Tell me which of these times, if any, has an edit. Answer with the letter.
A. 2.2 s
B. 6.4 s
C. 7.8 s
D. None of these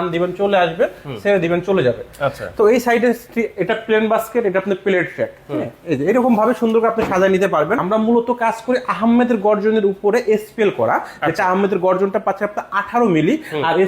C